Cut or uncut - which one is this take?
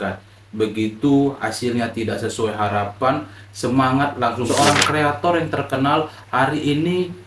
cut